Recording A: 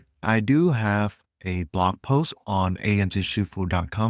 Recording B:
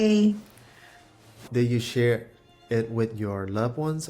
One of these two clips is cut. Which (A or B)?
B